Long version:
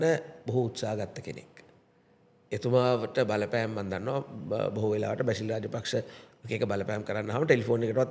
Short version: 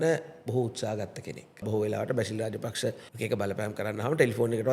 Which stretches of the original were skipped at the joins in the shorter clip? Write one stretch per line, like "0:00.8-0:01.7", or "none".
0:01.6-0:04.7
0:06.2-0:06.4

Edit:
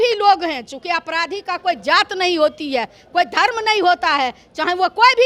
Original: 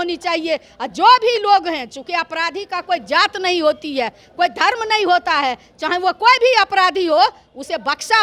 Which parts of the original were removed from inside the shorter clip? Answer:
none

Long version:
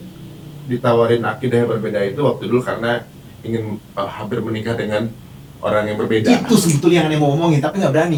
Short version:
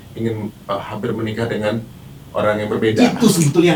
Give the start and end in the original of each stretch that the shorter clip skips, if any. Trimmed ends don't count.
none

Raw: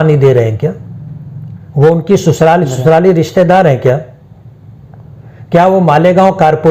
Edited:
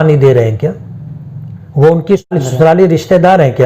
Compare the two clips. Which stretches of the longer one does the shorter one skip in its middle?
0:02.3-0:02.6

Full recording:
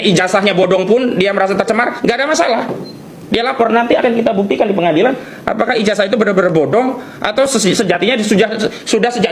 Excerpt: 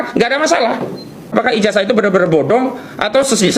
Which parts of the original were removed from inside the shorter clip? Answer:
0:03.0-0:05.4

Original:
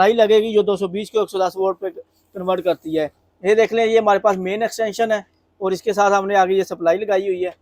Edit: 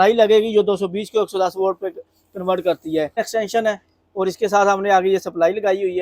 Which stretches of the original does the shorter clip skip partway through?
0:03.2-0:04.6

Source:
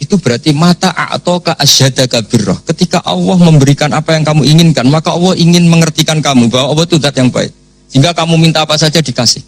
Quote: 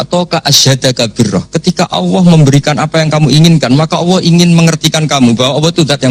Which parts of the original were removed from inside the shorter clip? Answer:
none

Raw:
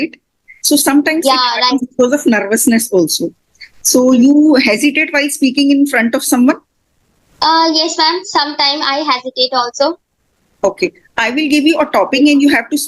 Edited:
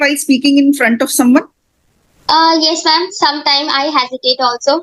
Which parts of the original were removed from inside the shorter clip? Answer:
none

